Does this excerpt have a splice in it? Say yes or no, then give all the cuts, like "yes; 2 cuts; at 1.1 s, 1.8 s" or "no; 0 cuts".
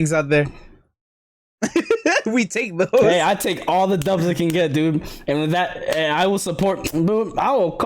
no; 0 cuts